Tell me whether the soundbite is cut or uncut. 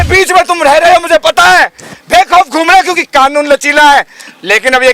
uncut